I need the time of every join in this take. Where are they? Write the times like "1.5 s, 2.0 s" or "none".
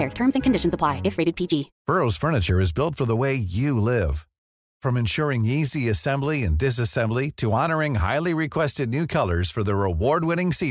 1.7 s